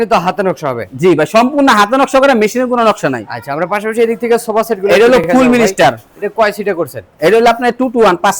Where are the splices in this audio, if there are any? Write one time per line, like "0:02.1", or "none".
none